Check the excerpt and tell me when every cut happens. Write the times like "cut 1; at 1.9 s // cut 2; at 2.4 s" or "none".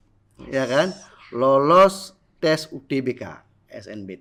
none